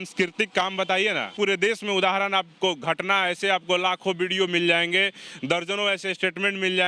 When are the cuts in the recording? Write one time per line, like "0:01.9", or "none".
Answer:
0:01.3